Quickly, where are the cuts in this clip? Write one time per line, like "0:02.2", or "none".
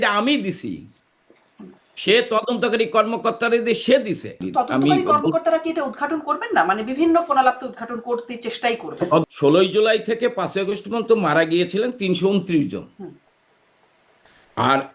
0:04.4
0:09.2